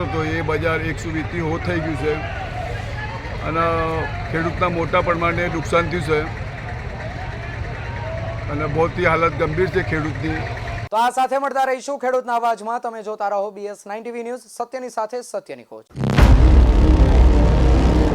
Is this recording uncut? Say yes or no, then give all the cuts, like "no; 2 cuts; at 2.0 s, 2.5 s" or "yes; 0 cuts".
yes; 0 cuts